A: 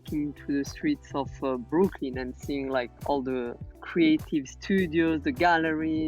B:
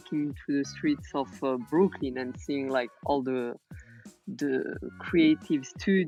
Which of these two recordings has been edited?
A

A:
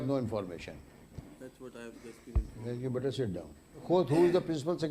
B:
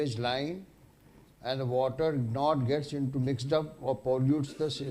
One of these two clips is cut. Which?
A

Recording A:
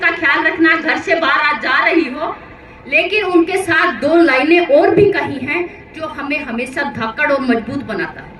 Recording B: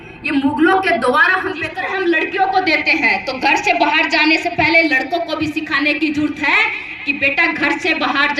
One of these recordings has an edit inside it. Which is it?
B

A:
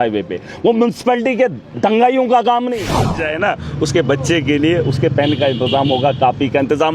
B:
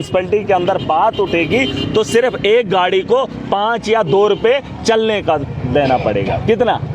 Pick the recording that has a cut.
A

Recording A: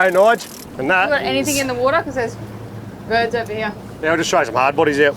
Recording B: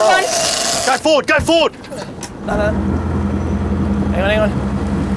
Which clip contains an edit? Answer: A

